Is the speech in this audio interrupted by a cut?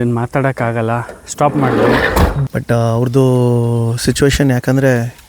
yes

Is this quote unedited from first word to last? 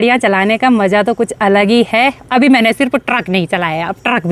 yes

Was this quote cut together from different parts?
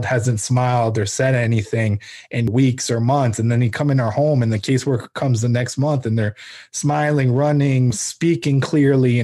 yes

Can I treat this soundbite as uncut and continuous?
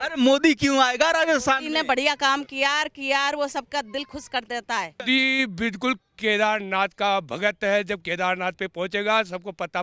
no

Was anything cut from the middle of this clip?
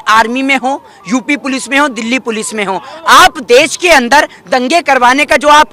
no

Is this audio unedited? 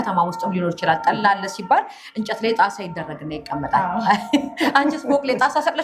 yes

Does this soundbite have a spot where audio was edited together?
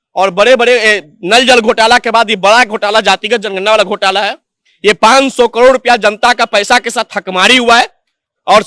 no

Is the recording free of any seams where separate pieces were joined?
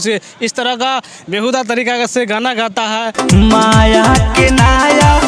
yes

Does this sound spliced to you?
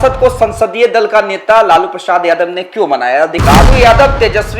yes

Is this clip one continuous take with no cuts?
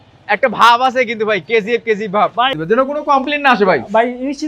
no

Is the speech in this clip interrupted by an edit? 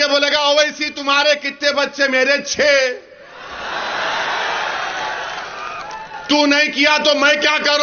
no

